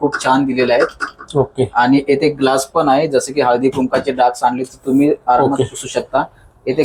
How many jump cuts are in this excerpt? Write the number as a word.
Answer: zero